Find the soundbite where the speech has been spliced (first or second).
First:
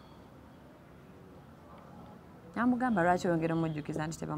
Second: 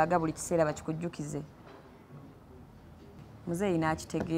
second